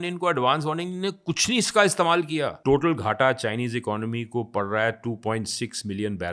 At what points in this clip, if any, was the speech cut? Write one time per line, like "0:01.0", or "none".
0:02.5